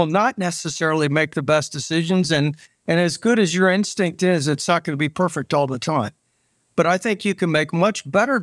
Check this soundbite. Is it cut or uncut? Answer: uncut